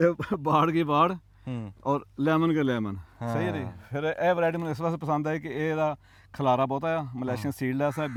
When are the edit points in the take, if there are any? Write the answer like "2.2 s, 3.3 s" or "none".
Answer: none